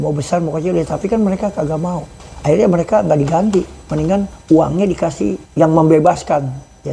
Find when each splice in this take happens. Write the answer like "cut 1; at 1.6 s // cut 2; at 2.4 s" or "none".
cut 1; at 2.1 s // cut 2; at 4.3 s // cut 3; at 5.4 s